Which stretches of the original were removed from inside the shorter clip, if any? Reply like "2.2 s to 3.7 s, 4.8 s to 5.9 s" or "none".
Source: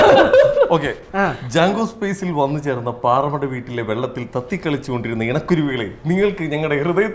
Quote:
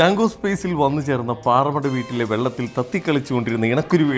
none